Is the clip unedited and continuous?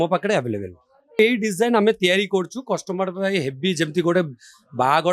no; 1 cut; at 1.2 s

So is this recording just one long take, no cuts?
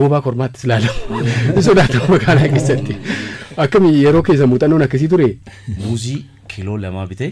no; 1 cut; at 5.5 s

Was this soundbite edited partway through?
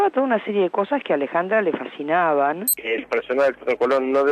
yes; 1 cut; at 2.8 s

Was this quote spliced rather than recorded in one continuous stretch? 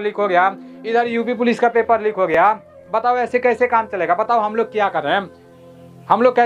no; 0 cuts

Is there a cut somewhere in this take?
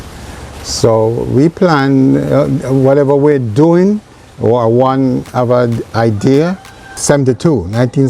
yes; 1 cut; at 6.9 s

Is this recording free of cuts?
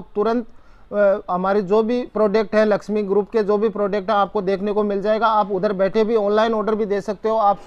yes; 0 cuts

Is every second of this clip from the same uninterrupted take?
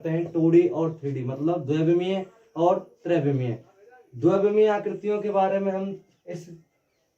yes; 0 cuts

